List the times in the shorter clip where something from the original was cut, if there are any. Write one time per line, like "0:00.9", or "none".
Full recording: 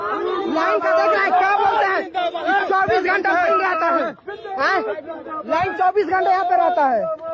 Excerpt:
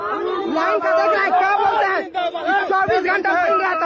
none